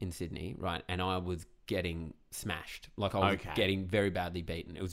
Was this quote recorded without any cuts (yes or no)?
yes